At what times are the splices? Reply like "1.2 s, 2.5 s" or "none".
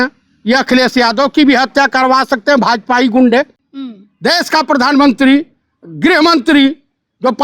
none

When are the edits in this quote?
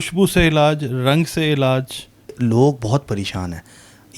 2.4 s

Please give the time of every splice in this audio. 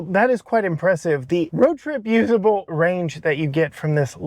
1.5 s, 2.7 s

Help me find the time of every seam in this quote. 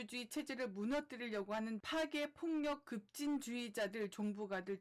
none

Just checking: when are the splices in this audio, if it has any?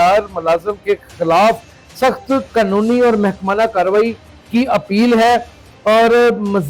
none

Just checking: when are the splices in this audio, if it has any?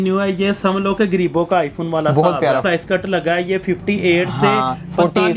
2.6 s

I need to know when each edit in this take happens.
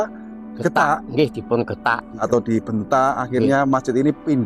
2.2 s

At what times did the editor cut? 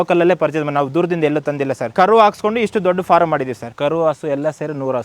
1.9 s, 3.6 s

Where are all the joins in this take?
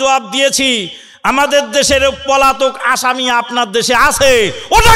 none

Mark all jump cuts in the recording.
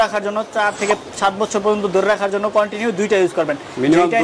none

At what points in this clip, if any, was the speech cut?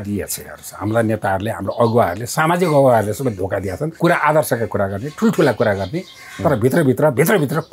3.9 s

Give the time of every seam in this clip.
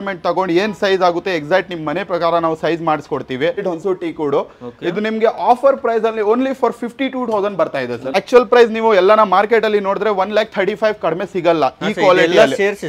3.6 s, 8.1 s

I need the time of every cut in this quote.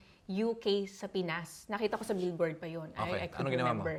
none

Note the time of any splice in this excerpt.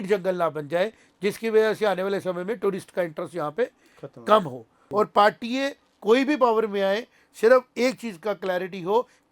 4.8 s

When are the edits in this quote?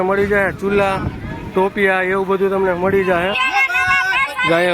3.4 s

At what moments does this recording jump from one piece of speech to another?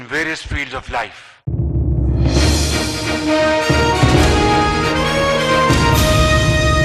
1.4 s

